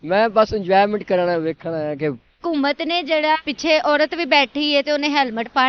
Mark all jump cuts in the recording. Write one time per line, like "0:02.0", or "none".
0:02.3